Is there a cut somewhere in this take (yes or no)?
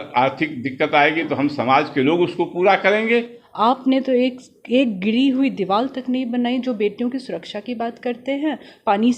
yes